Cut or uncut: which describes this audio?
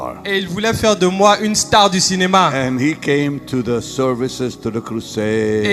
uncut